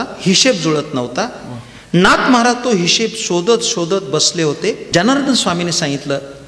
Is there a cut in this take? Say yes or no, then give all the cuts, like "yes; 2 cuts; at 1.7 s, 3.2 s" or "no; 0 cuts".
yes; 1 cut; at 4.8 s